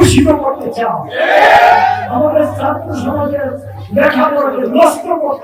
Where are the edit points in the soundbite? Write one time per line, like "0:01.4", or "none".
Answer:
0:02.0